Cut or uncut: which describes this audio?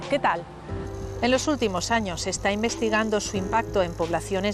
cut